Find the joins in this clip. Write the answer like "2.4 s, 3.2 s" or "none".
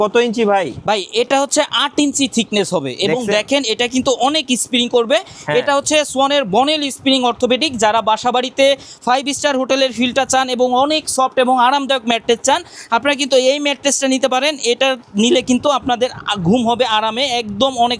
none